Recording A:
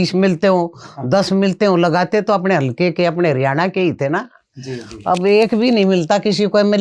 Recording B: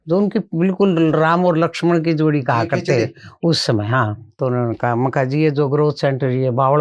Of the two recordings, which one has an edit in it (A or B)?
B